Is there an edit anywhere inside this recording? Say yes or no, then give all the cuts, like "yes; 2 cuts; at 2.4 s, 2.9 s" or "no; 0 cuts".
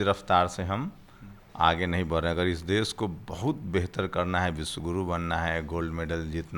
no; 0 cuts